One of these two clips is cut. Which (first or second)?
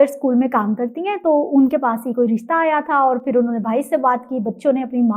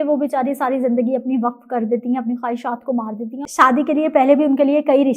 second